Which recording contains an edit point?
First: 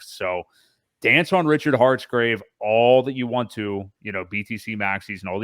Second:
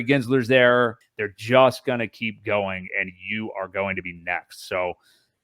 second; 1 cut; at 1.0 s

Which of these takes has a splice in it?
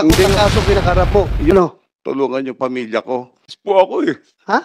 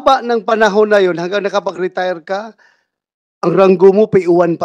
first; 2 cuts; at 1.5 s, 3.5 s

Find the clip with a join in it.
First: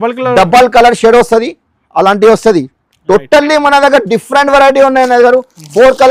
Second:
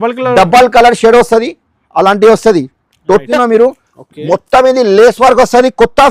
second; 1 cut; at 3.3 s

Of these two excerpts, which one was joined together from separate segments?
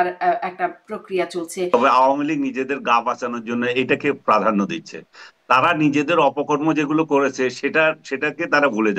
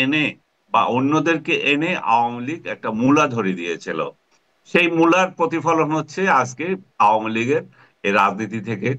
first; 1 cut; at 1.7 s

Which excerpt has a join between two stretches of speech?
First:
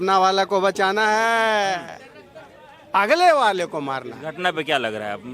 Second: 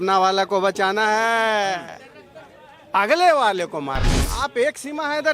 second; 1 cut; at 4.2 s

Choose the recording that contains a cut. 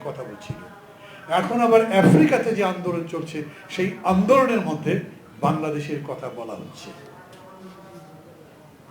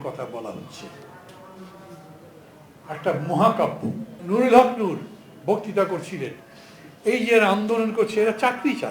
second; 1 cut; at 4.1 s

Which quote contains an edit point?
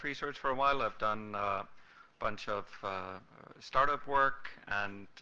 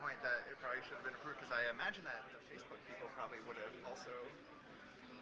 second; 1 cut; at 2.1 s

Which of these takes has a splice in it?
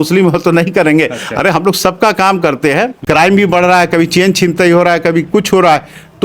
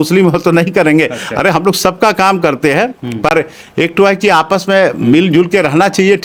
first; 1 cut; at 3.0 s

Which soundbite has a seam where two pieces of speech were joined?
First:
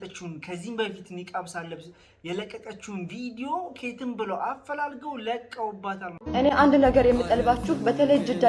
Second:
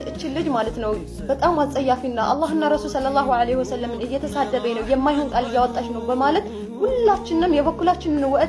first; 1 cut; at 6.1 s

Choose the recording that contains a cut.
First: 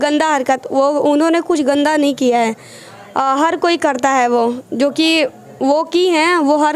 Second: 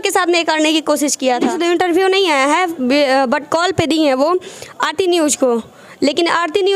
second; 1 cut; at 1.5 s

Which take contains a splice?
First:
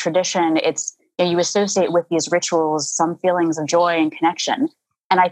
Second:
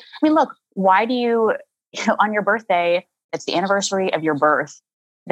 second; 1 cut; at 3.3 s

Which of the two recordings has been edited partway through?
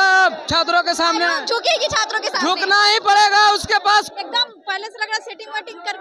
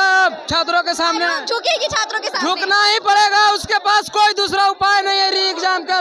first; 1 cut; at 4.1 s

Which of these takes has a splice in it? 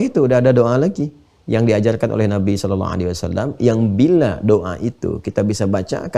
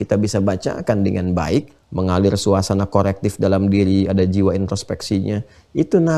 second; 1 cut; at 1.8 s

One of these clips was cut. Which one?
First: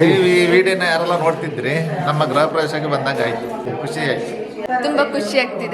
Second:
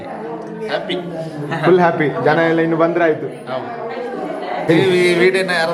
first; 1 cut; at 4.6 s

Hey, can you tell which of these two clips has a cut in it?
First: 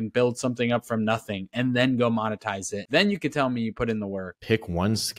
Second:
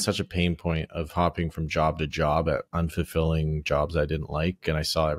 first; 2 cuts; at 2.8 s, 4.3 s

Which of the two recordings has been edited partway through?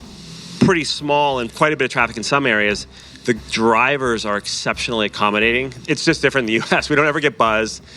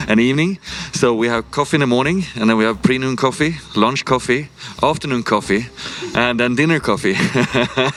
first; 2 cuts; at 1.5 s, 5.7 s

